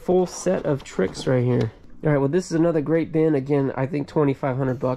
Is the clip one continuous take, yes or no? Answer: no